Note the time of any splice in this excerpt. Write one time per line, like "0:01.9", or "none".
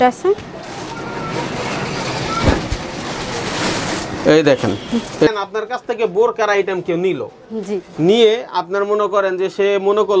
0:05.3